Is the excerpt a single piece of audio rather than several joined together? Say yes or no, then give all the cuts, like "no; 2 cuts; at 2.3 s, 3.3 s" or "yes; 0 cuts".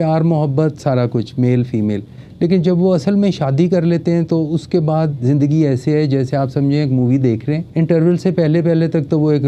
no; 1 cut; at 7.6 s